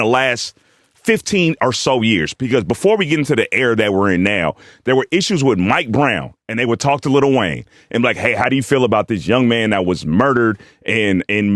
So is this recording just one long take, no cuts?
yes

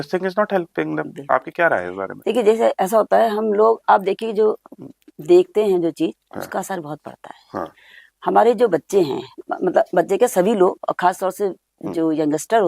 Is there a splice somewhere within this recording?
no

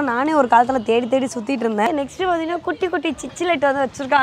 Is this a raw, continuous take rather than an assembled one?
no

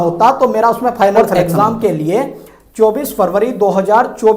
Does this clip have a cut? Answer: yes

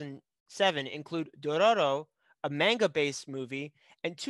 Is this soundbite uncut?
yes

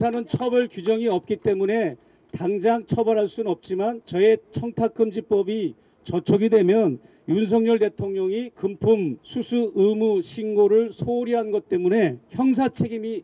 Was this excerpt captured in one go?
no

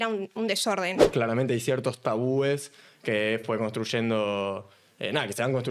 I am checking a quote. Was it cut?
yes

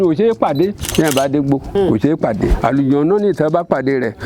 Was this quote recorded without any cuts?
no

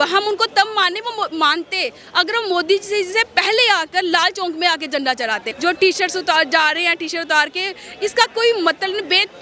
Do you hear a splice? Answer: yes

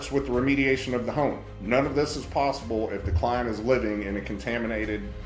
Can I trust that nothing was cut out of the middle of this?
yes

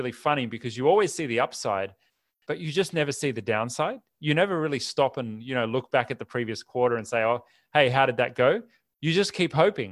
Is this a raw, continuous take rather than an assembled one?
yes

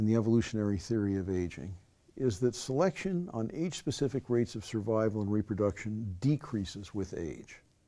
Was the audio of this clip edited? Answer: yes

